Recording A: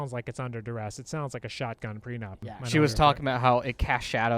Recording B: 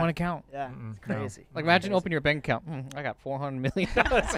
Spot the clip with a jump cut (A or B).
A